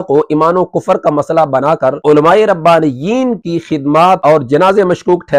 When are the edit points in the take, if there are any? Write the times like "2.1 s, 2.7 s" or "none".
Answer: 2.0 s, 3.9 s